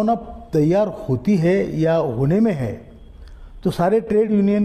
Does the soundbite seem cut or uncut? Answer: uncut